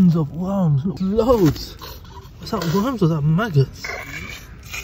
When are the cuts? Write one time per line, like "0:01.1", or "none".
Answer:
0:01.0

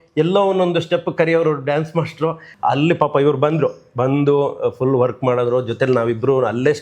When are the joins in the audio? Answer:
0:02.5

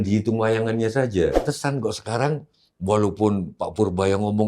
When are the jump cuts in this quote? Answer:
0:01.5

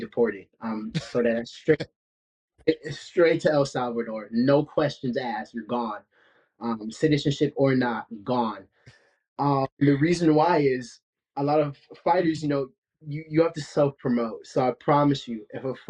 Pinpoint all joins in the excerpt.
none

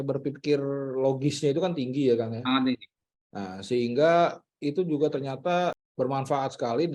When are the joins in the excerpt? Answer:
0:05.8

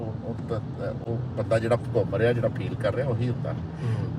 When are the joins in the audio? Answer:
none

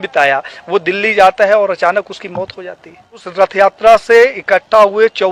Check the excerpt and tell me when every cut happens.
0:03.3

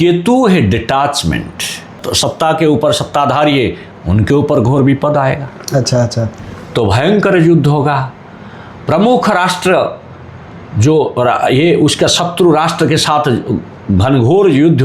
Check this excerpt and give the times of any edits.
0:02.0
0:06.3

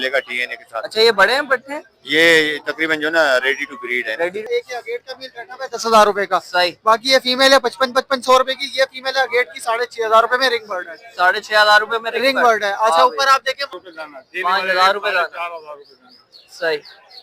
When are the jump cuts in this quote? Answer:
0:04.4
0:13.7

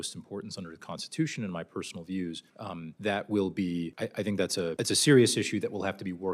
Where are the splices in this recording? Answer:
0:02.7
0:03.9
0:04.7

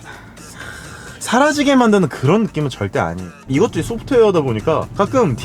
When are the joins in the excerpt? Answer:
0:01.1
0:03.4

